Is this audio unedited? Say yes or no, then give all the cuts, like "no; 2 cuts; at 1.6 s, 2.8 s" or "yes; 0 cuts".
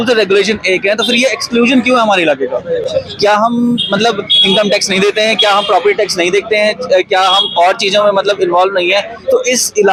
yes; 0 cuts